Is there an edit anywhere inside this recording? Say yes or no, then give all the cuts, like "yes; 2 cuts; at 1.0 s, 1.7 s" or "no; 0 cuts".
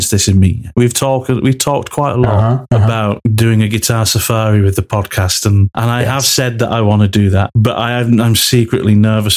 no; 0 cuts